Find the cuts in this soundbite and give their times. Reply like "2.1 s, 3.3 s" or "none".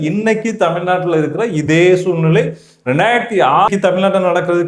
3.7 s